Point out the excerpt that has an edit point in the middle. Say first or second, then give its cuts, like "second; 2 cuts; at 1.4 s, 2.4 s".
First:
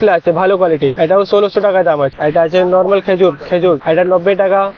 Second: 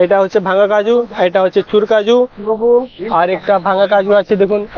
first; 3 cuts; at 0.9 s, 2.1 s, 3.8 s